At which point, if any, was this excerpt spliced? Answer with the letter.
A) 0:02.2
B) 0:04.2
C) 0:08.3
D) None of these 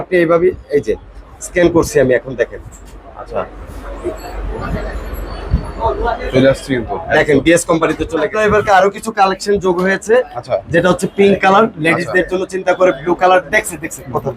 C